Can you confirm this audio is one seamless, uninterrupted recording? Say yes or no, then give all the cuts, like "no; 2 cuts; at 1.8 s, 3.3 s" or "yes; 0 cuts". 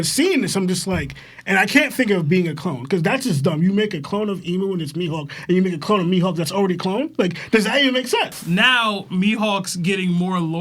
no; 1 cut; at 8.4 s